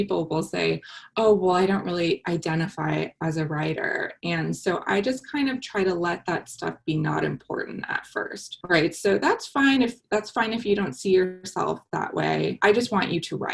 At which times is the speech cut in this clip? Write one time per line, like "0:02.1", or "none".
0:08.5
0:12.6